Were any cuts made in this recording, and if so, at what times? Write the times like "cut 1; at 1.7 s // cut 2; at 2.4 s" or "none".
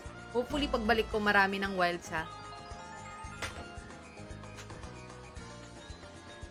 none

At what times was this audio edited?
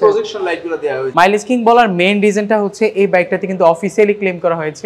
cut 1; at 1.0 s

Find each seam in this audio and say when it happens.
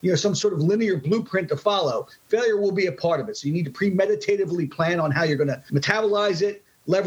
cut 1; at 5.6 s

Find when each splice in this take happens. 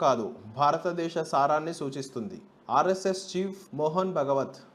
none

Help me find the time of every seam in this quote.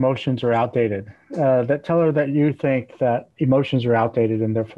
cut 1; at 3.3 s

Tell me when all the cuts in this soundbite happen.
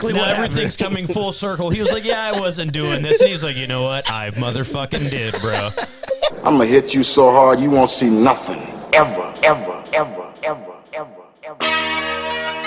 cut 1; at 6.4 s

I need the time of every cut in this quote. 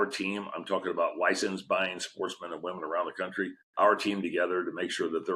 cut 1; at 3.6 s

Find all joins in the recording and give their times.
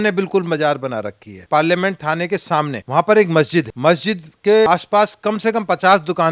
cut 1; at 1.4 s // cut 2; at 2.8 s // cut 3; at 3.7 s // cut 4; at 4.7 s

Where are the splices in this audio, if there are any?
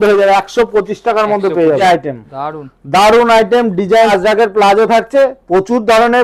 cut 1; at 1.8 s // cut 2; at 4.1 s

